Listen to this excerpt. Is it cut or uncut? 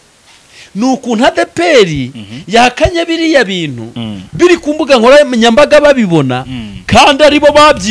uncut